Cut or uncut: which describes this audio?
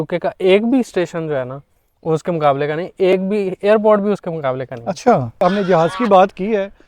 uncut